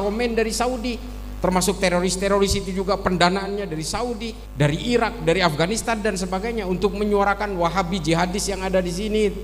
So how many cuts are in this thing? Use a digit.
1